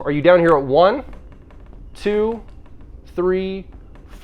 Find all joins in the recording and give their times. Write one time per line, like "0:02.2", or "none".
none

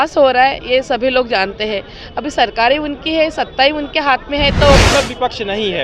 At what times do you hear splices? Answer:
0:04.8

